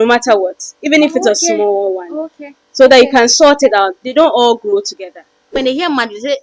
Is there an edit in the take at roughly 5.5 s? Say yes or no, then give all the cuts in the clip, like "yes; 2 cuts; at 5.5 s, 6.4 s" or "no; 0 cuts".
yes; 1 cut; at 5.5 s